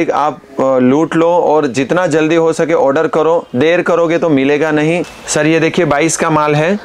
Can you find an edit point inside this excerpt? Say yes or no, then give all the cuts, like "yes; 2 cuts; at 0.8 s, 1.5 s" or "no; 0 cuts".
yes; 1 cut; at 5.2 s